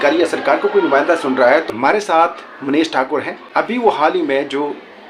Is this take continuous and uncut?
no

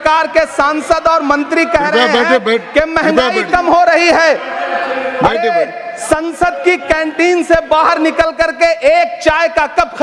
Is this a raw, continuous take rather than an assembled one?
yes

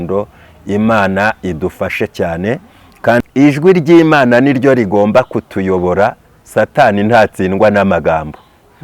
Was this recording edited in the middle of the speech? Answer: yes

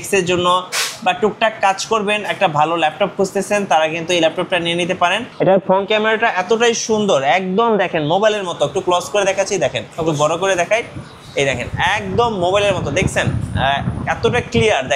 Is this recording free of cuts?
no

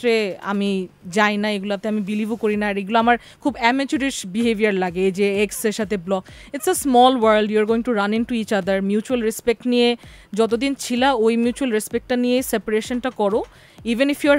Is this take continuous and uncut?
yes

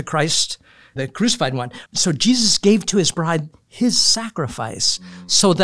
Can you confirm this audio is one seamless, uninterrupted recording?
no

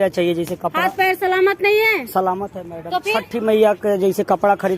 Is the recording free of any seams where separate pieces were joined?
no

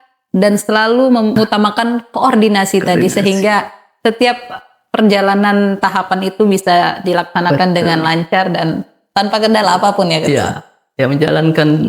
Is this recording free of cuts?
no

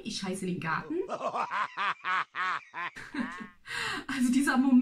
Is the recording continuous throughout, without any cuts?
no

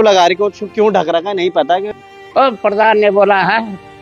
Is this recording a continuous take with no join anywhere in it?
no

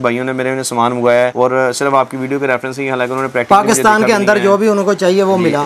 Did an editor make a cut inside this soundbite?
no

